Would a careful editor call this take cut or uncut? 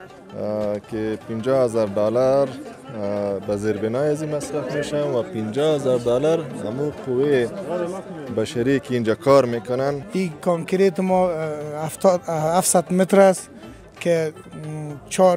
cut